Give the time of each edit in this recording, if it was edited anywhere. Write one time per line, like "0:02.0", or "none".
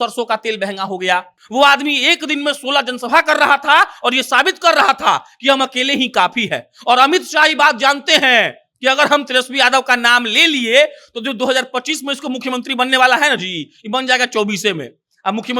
0:01.3

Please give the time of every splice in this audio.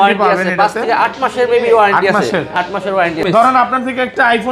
0:03.2

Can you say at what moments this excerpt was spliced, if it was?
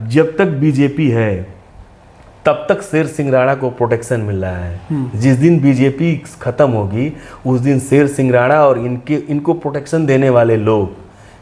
none

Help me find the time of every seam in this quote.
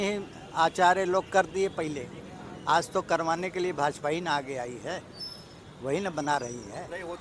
none

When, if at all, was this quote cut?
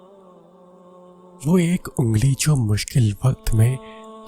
0:01.1

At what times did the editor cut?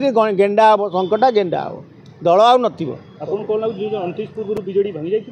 none

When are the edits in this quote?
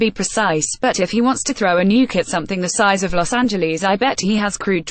none

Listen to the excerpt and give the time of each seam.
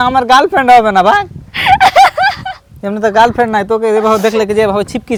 none

